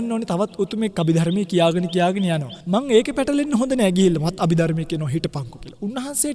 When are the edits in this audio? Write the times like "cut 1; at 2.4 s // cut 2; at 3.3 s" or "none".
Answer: cut 1; at 0.9 s // cut 2; at 2.5 s

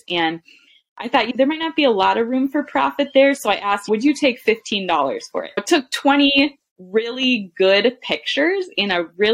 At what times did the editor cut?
cut 1; at 5.6 s

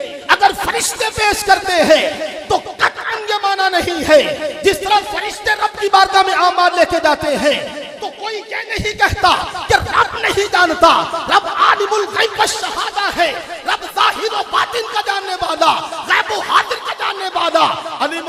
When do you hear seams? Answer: none

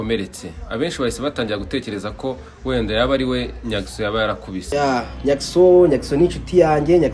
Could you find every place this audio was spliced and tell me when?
cut 1; at 4.5 s

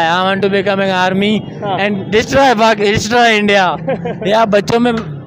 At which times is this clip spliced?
none

